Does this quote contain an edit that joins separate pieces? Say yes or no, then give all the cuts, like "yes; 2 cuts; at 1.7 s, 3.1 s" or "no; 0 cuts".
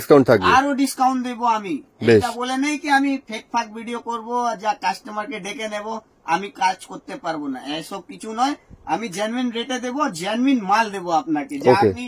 no; 0 cuts